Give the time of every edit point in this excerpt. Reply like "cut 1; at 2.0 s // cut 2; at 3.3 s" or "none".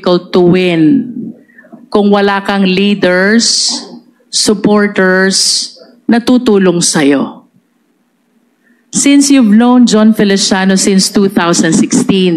none